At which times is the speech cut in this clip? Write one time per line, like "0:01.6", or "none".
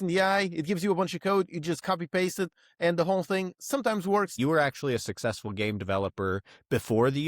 0:04.3